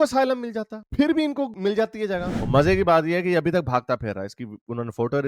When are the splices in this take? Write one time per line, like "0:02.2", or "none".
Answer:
0:02.3